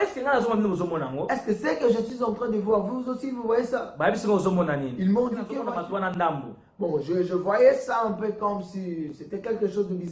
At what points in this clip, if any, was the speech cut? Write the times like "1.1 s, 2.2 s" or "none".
5.6 s